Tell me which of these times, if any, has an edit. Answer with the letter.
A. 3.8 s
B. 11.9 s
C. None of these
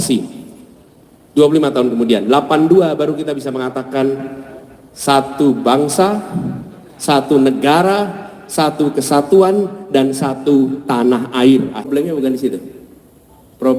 B